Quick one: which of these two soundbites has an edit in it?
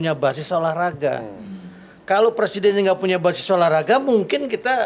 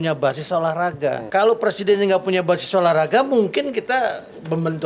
second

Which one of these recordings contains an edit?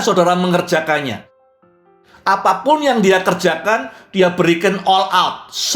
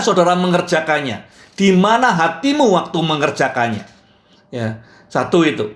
first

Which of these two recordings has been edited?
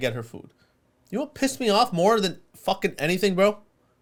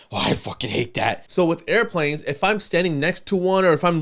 second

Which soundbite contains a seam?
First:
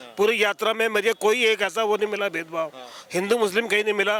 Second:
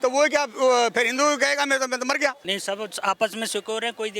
second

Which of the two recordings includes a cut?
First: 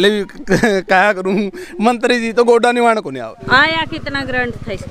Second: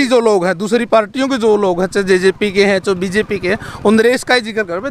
first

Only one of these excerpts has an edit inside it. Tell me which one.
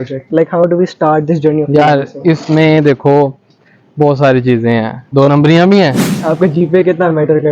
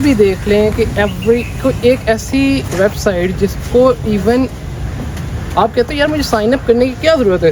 first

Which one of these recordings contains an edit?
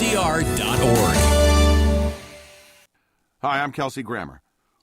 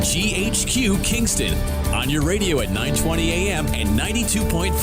first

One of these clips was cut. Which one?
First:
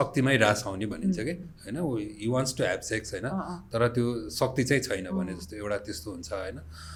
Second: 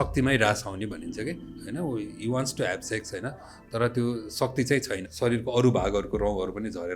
second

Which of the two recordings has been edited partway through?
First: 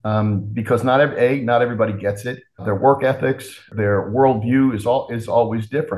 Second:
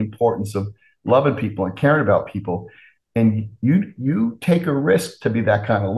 first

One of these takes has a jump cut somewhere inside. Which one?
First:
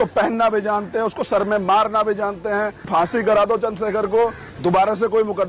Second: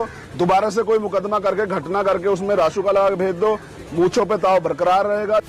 first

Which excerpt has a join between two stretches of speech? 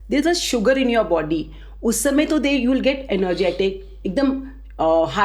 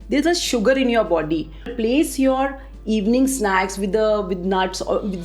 second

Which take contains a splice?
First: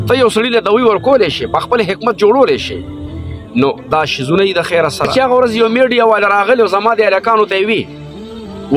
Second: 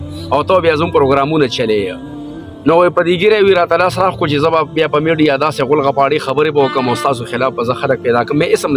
first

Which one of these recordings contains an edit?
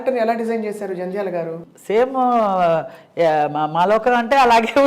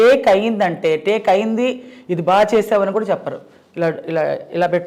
first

